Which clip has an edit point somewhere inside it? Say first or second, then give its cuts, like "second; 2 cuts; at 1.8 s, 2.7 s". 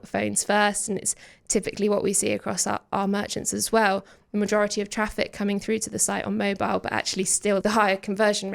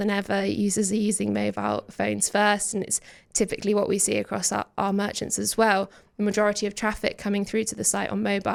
first; 1 cut; at 7.6 s